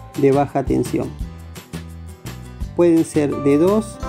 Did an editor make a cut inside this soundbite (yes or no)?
yes